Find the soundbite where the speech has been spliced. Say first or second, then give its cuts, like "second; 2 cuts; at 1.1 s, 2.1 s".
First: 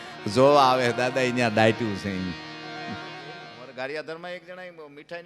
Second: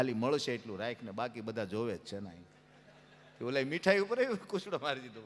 first; 1 cut; at 3.4 s